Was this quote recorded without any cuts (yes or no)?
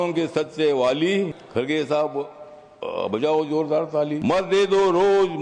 no